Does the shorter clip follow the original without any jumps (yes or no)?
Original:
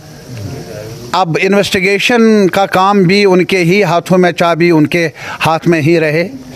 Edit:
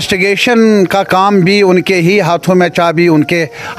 yes